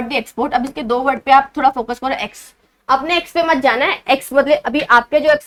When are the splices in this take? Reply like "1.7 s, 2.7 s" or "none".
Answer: none